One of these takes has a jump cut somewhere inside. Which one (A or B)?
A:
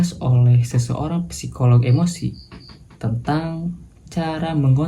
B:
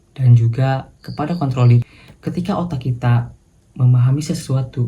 B